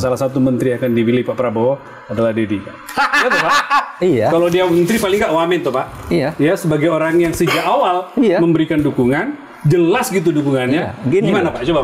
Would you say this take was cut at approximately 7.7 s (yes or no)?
no